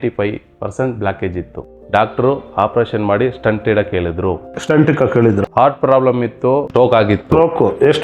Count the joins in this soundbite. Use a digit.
1